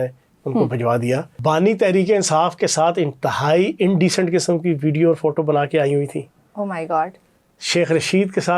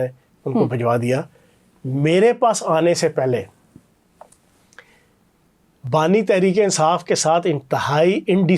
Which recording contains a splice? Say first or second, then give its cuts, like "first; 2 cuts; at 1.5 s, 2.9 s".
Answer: first; 1 cut; at 1.3 s